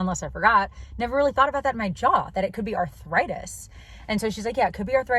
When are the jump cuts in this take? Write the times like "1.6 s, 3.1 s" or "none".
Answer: none